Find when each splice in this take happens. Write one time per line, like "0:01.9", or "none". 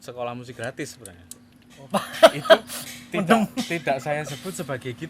0:01.9